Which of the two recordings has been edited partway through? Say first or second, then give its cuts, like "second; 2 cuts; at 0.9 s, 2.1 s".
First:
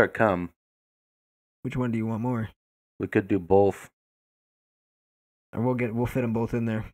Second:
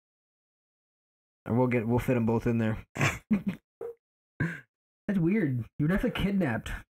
second; 1 cut; at 4.7 s